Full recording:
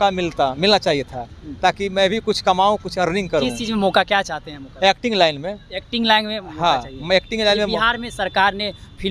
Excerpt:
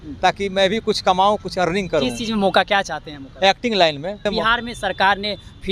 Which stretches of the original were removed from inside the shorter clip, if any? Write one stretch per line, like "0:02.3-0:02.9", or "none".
0:05.6-0:07.6